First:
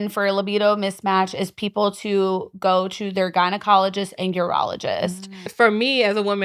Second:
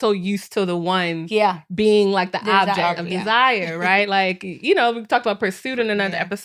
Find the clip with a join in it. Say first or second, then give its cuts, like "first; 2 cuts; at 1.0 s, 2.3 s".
first; 1 cut; at 5.4 s